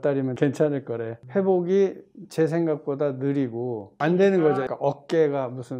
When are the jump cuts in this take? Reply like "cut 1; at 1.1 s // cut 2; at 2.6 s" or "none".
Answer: cut 1; at 1.1 s // cut 2; at 4.7 s